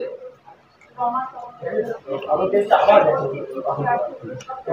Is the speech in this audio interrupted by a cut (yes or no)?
yes